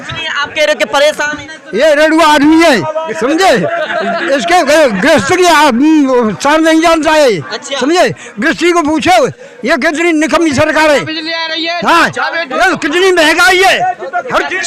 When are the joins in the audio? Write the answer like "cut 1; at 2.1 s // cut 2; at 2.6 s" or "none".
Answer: cut 1; at 1.6 s